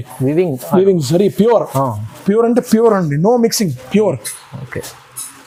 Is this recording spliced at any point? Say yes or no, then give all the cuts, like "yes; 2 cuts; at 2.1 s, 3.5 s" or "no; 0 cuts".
no; 0 cuts